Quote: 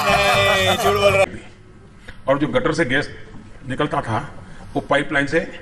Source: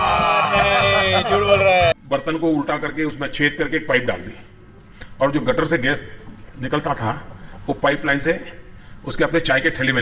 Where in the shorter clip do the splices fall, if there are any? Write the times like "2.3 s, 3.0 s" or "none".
1.2 s